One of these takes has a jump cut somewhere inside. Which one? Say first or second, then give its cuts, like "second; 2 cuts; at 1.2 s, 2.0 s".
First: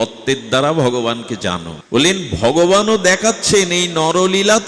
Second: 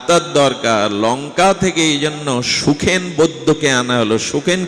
first; 1 cut; at 1.7 s